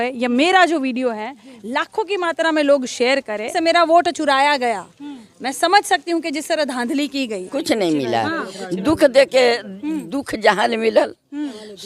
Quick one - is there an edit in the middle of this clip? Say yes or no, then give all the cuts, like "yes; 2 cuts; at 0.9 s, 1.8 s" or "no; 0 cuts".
yes; 2 cuts; at 3.5 s, 7.4 s